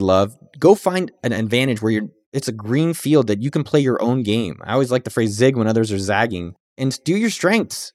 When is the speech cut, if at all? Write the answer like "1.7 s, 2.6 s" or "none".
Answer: none